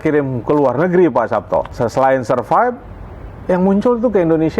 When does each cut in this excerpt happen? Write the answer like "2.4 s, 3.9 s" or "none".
1.7 s